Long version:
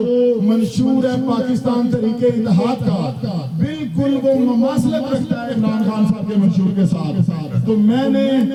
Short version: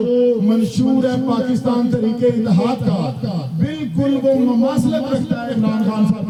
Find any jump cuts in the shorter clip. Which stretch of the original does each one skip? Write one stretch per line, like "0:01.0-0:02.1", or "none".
none